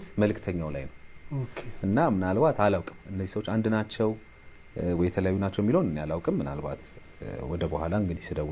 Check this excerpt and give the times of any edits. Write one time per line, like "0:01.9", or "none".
none